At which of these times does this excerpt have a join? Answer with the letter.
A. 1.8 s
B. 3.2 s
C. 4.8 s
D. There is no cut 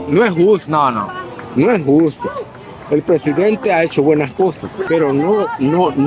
C